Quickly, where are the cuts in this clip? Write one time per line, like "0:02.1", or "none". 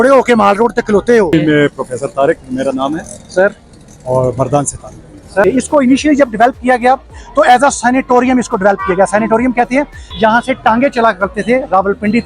0:01.3
0:05.4
0:10.0